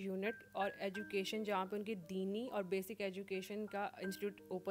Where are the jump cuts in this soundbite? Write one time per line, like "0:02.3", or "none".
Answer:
none